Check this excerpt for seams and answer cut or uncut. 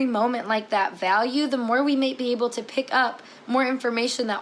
uncut